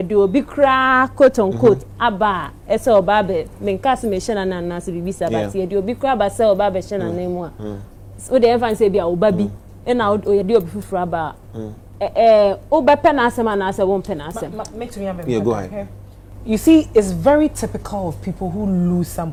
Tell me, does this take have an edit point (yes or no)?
no